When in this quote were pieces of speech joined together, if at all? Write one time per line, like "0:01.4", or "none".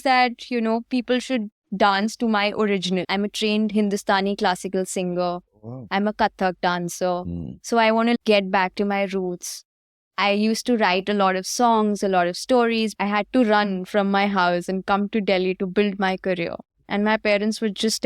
0:03.1
0:08.2
0:12.9